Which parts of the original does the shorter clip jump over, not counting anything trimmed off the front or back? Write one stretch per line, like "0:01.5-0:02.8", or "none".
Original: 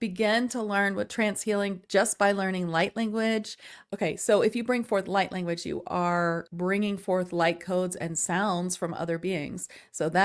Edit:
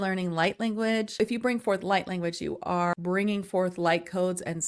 0:03.6-0:04.4
0:06.2-0:06.5